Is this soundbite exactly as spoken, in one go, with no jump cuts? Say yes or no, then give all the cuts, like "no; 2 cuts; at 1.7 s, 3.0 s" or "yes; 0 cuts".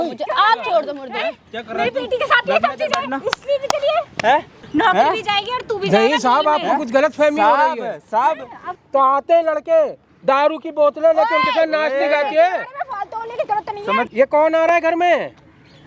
no; 3 cuts; at 4.6 s, 8.7 s, 14.1 s